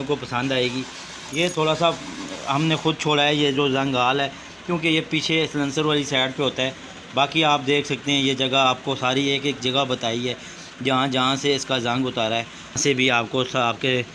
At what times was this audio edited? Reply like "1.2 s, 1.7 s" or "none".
12.8 s